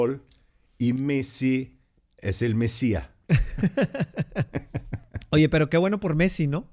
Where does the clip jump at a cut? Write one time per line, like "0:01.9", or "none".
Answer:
none